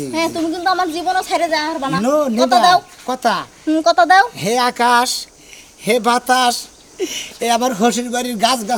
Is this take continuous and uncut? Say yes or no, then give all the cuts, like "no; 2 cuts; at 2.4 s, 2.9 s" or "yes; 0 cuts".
yes; 0 cuts